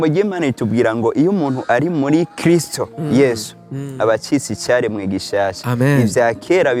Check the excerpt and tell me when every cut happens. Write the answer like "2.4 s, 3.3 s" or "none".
none